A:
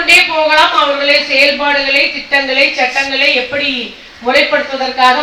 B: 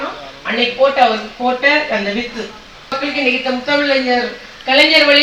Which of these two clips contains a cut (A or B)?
B